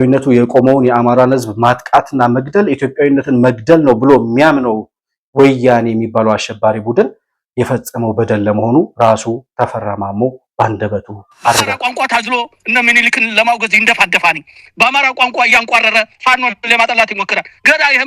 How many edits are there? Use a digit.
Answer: 1